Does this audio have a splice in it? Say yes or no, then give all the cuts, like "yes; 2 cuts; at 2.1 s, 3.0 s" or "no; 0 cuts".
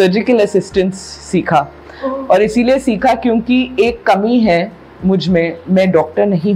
no; 0 cuts